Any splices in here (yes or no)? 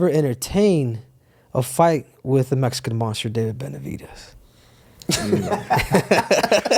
no